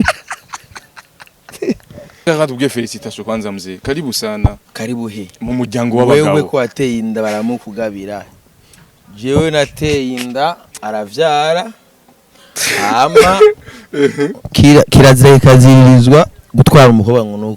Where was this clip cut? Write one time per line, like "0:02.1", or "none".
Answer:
0:02.3